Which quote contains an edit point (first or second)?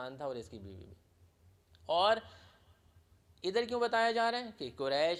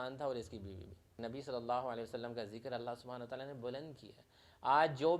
second